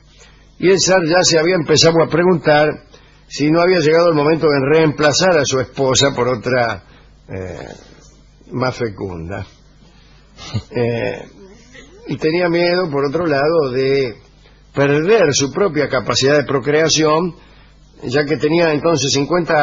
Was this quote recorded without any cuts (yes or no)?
yes